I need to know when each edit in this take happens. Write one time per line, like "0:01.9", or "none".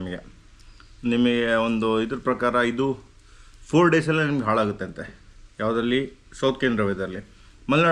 none